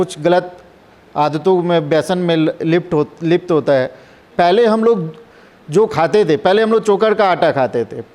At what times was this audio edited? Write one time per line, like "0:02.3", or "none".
0:04.3